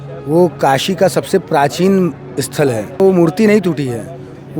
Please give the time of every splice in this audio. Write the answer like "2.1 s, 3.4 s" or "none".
3.0 s